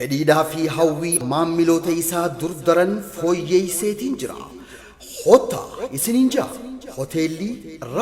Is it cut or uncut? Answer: cut